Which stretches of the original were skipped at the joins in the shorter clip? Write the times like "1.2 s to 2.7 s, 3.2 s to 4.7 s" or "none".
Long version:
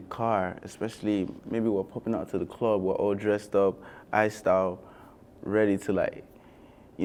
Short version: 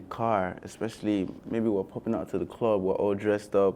none